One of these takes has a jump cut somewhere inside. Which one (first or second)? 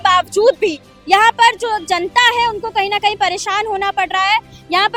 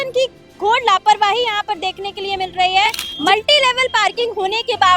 second